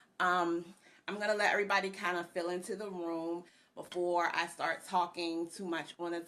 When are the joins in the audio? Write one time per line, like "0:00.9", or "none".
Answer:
0:04.3